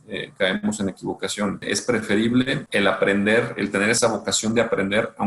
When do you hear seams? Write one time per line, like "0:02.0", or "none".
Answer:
0:01.6
0:02.6
0:04.0